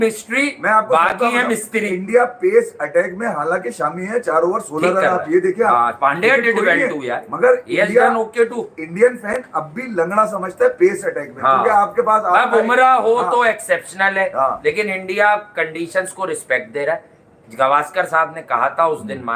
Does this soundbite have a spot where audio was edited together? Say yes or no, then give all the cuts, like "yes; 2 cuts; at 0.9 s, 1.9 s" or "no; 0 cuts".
no; 0 cuts